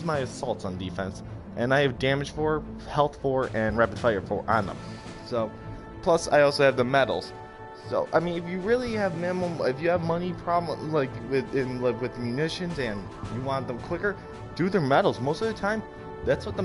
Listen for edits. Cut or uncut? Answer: cut